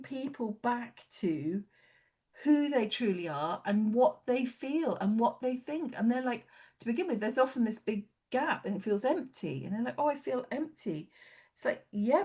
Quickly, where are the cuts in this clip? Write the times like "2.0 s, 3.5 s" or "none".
none